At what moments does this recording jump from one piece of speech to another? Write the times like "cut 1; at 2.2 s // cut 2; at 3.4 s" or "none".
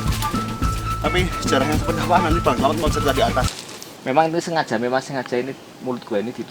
cut 1; at 3.6 s